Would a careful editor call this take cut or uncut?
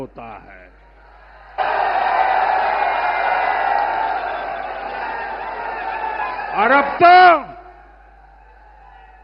uncut